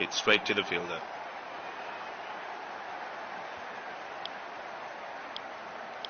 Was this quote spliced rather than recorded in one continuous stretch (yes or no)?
no